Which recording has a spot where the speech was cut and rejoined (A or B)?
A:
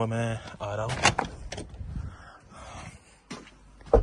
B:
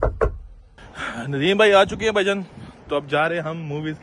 B